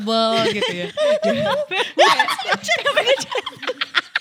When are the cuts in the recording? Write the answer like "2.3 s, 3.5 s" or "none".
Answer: none